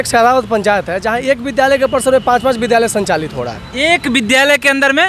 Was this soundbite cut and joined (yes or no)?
no